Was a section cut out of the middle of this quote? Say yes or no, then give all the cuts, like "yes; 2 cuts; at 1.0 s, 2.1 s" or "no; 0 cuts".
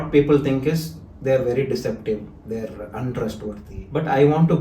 yes; 1 cut; at 3.7 s